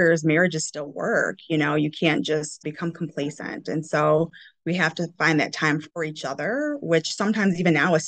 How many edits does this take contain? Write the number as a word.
two